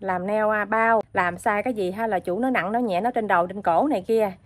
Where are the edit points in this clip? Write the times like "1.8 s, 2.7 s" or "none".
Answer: 1.1 s